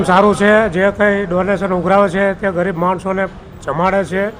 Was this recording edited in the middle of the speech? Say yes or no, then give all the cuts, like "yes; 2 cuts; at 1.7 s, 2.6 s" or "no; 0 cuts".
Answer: no; 0 cuts